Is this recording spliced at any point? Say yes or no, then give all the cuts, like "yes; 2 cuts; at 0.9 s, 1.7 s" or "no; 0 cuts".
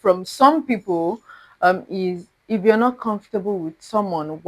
no; 0 cuts